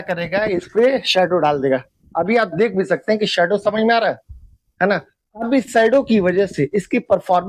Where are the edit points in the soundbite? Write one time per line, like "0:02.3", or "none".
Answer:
none

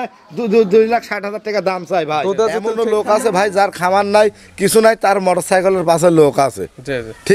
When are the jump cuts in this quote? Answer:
0:02.8

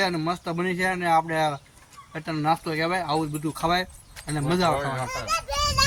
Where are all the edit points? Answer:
none

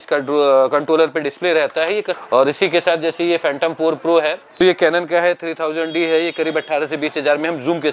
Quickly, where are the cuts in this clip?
0:02.2
0:04.4

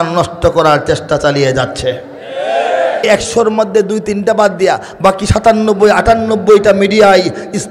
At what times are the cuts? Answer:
0:03.1

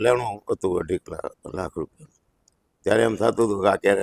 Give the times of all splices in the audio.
none

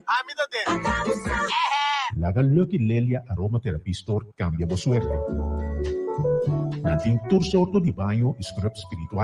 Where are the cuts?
none

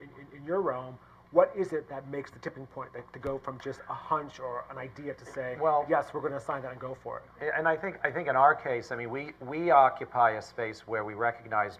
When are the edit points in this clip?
0:05.5

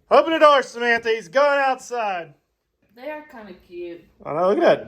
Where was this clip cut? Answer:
0:02.8

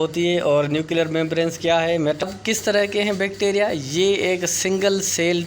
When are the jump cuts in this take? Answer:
0:02.2

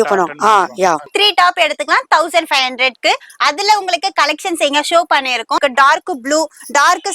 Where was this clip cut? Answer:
0:01.1
0:05.6

